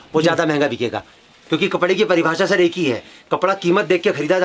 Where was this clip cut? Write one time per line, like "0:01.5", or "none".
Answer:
none